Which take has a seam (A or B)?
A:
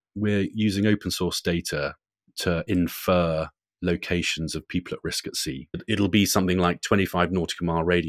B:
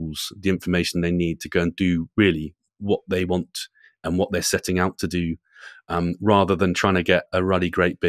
A